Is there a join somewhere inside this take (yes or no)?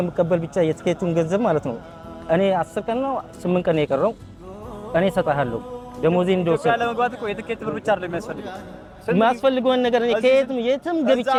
no